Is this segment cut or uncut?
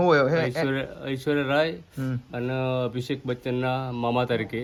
uncut